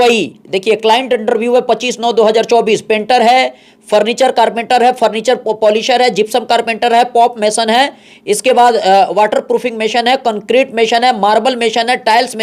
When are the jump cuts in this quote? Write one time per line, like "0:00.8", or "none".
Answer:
none